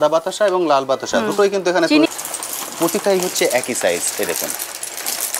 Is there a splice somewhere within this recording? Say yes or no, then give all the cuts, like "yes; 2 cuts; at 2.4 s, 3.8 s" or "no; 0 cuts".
yes; 1 cut; at 2.1 s